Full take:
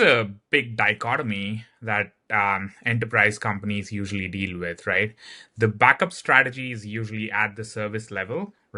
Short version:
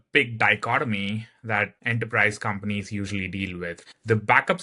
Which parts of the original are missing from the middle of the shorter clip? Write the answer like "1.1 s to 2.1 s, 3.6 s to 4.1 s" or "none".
2.2 s to 2.8 s, 4.8 s to 5.3 s